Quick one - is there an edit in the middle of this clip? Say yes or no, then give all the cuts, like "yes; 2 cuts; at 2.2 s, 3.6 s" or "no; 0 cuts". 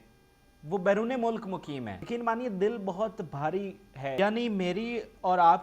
yes; 2 cuts; at 2.0 s, 4.1 s